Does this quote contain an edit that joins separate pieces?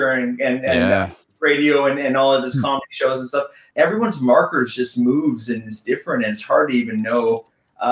yes; 1 cut; at 3.6 s

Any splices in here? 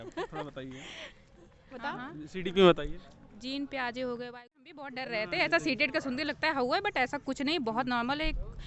yes; 1 cut; at 4.8 s

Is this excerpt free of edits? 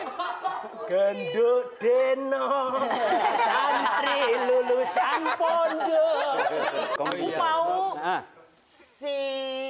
no; 1 cut; at 7.0 s

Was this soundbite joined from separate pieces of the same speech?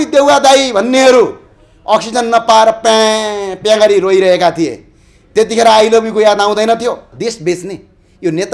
yes; 1 cut; at 7.1 s

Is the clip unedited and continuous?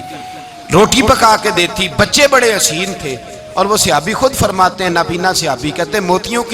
yes; 0 cuts

